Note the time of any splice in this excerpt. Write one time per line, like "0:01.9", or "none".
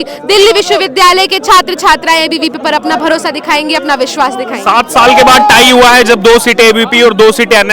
none